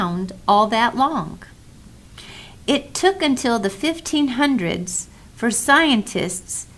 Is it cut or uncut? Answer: cut